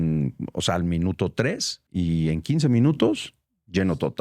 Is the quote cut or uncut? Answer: cut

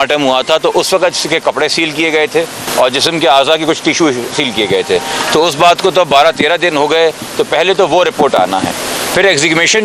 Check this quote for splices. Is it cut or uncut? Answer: uncut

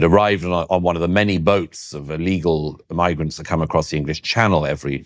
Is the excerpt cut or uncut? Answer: uncut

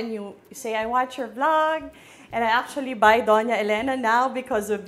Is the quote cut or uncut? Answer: uncut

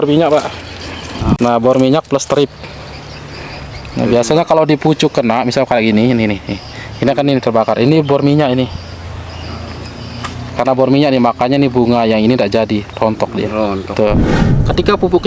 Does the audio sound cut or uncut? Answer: cut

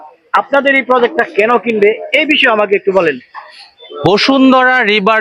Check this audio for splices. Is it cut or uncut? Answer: uncut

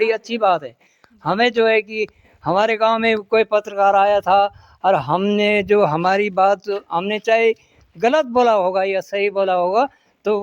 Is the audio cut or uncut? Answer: uncut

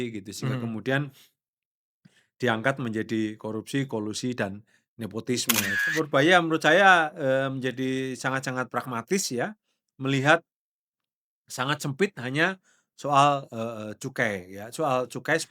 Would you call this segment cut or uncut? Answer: cut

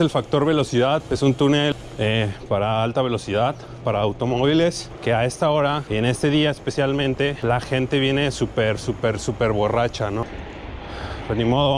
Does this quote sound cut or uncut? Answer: cut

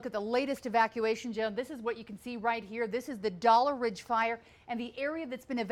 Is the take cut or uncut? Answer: uncut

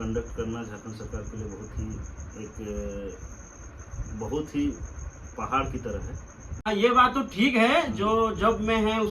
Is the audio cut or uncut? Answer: cut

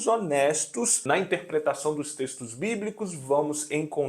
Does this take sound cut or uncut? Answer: cut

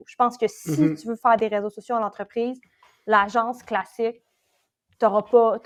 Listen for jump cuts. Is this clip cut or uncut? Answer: uncut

